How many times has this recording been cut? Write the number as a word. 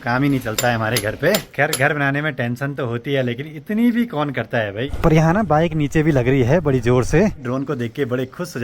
three